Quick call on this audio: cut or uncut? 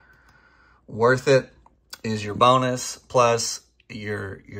uncut